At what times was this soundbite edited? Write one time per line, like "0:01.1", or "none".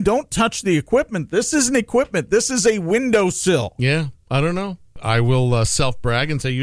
0:05.0

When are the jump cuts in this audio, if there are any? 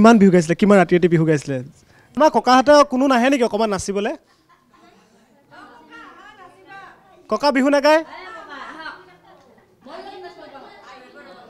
0:02.0

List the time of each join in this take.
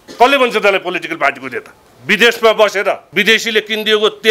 0:03.1

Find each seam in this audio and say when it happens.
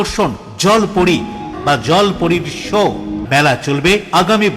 0:01.5
0:03.2

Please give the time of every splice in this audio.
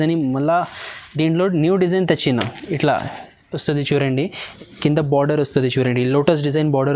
0:04.4

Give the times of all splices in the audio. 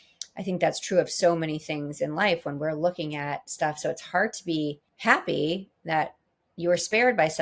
0:04.9

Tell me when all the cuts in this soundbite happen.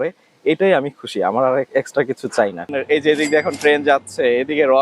0:02.8

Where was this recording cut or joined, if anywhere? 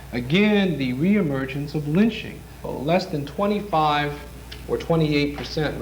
0:02.7

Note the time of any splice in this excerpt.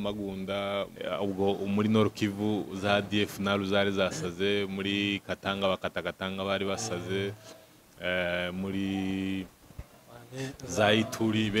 0:00.9

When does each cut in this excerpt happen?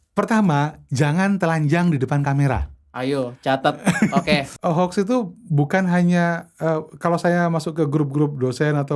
0:04.5

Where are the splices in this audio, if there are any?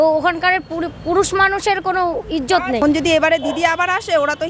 0:02.8

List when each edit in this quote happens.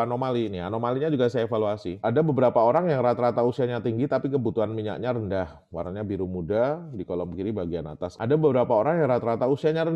none

